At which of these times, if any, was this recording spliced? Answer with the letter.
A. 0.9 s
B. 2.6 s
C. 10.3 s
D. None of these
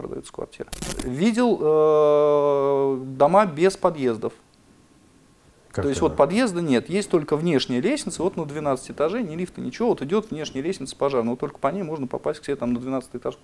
A